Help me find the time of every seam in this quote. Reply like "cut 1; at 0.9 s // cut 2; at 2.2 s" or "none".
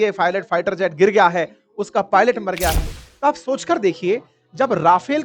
cut 1; at 2.9 s